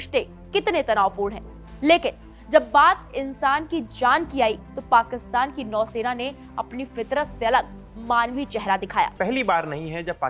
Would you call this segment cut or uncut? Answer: cut